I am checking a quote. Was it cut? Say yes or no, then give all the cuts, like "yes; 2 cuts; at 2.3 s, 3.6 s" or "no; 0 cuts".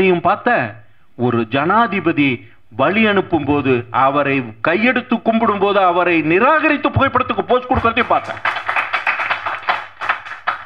no; 0 cuts